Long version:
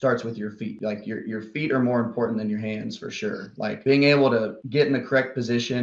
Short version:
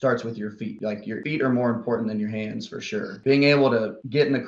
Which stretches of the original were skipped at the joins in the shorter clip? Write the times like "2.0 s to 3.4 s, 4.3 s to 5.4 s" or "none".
1.2 s to 1.5 s, 3.5 s to 3.8 s